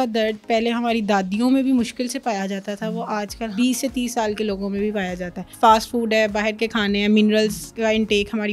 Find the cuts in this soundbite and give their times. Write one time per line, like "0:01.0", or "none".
0:03.5
0:05.4
0:07.7